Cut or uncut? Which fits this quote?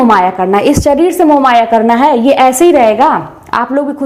uncut